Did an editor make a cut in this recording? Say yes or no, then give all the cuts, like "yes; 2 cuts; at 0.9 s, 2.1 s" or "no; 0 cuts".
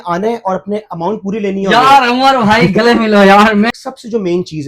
yes; 1 cut; at 3.7 s